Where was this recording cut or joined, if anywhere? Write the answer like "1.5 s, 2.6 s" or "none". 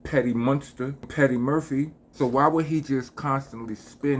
1.1 s, 2.0 s